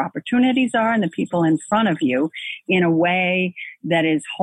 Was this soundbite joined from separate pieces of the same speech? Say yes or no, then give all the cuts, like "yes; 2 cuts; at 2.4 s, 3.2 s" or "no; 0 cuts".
no; 0 cuts